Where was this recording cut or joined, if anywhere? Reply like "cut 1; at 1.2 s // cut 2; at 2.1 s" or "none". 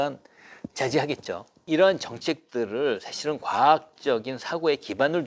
cut 1; at 1.6 s

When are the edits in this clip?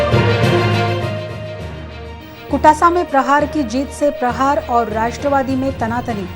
cut 1; at 0.9 s

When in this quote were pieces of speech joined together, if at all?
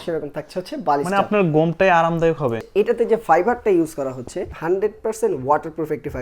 cut 1; at 2.6 s // cut 2; at 4.5 s

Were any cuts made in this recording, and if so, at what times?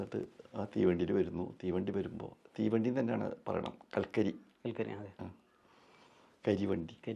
none

